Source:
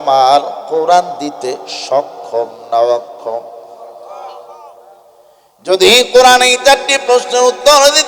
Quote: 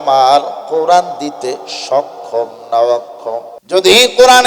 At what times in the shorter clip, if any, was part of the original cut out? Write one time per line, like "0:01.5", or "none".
0:03.5